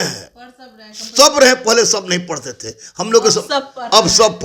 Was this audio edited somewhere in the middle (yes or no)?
no